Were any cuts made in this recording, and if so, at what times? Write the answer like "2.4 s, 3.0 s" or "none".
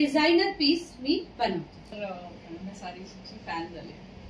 1.9 s